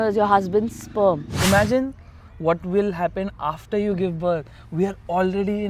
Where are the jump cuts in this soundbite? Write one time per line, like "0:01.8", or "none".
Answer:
0:01.3